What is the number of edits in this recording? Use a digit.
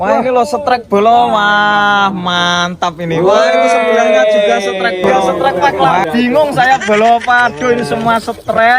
1